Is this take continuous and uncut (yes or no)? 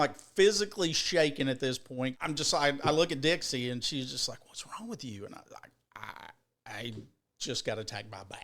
no